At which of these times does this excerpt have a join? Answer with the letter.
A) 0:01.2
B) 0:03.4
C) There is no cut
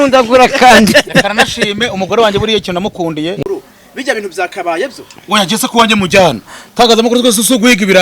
B